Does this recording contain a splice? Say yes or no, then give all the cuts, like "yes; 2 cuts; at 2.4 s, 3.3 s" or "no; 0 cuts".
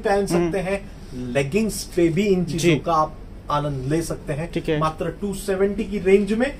no; 0 cuts